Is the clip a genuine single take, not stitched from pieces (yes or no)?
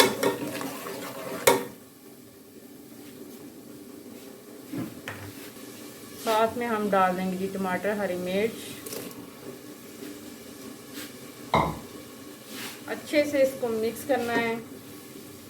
no